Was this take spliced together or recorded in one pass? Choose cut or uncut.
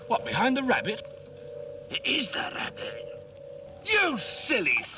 cut